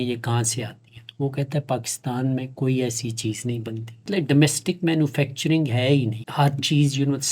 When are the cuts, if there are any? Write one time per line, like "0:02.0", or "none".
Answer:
0:04.2
0:06.2